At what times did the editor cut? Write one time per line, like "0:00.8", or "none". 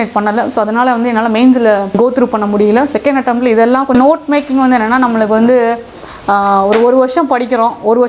0:01.9
0:03.9